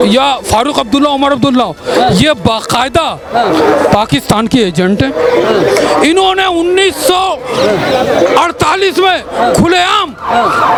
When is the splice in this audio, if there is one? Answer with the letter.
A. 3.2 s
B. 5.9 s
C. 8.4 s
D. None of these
D